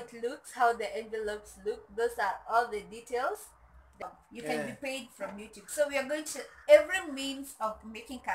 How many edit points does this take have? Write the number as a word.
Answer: one